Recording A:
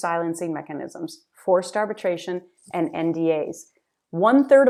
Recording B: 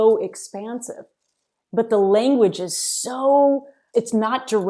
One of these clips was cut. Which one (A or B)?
B